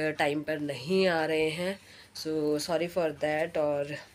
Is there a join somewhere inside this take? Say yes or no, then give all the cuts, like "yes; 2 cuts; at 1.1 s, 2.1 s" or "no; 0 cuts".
no; 0 cuts